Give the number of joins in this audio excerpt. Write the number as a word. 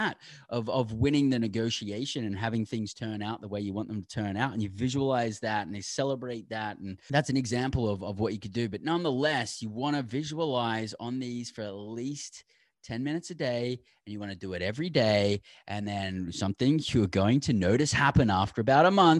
one